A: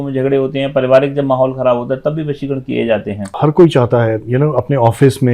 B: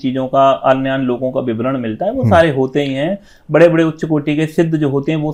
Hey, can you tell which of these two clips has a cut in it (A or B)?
A